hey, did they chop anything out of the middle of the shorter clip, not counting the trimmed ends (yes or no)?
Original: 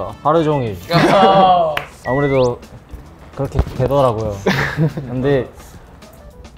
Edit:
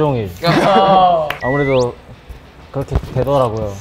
yes